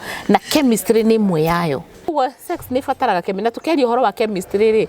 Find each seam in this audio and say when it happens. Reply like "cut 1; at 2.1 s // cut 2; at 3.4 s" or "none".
cut 1; at 2.1 s